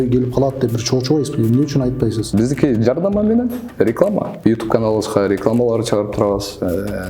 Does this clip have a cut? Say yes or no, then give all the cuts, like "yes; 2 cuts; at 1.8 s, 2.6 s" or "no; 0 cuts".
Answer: yes; 2 cuts; at 2.3 s, 4.3 s